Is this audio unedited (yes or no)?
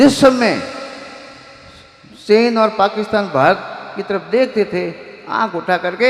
yes